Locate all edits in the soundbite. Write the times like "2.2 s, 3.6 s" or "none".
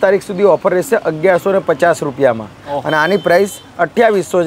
none